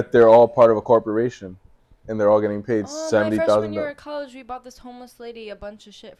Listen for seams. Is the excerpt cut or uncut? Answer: uncut